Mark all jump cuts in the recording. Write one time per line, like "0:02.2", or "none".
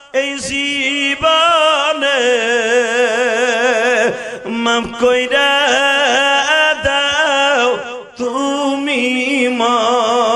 none